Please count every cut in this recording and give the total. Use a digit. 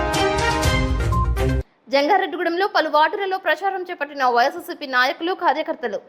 1